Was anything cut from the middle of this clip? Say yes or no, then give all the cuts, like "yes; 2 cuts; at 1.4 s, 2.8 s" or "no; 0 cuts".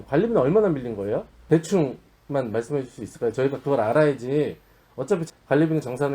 yes; 2 cuts; at 1.3 s, 5.2 s